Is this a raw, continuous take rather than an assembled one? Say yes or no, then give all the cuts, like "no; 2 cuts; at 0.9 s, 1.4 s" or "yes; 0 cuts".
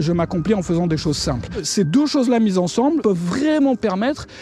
no; 2 cuts; at 1.7 s, 3.0 s